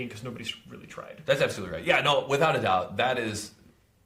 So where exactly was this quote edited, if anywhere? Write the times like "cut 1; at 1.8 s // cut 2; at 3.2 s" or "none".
none